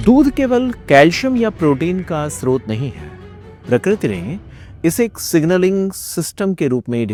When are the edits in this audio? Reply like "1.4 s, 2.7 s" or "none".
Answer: none